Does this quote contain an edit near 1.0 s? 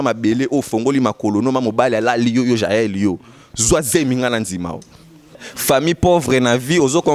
no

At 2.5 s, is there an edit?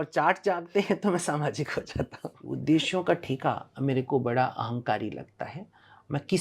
yes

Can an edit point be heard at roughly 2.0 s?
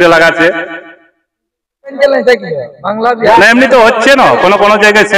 yes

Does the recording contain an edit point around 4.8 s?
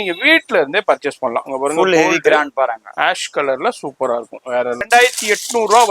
yes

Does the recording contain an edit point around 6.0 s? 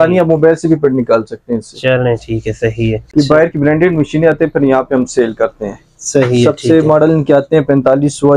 no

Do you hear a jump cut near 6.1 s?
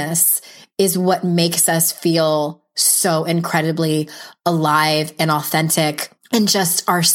yes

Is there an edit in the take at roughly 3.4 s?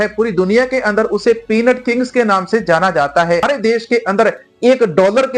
yes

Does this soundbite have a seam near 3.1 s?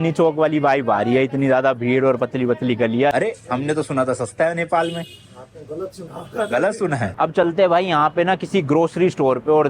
yes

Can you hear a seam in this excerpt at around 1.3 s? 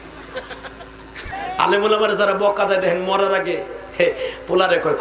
yes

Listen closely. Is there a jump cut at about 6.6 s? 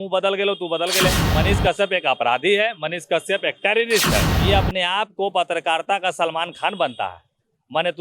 no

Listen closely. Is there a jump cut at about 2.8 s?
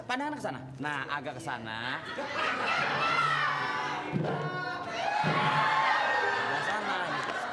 no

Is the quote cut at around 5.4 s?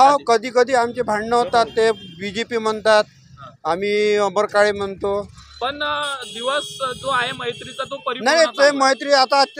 yes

